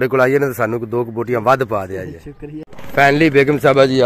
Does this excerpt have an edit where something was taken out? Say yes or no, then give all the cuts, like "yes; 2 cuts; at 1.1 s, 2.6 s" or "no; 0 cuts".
yes; 1 cut; at 2.7 s